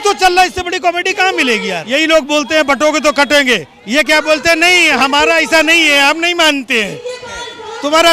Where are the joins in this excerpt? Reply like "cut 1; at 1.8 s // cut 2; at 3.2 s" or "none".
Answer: cut 1; at 1.8 s